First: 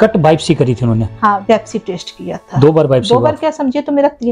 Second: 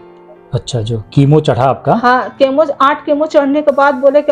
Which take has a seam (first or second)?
first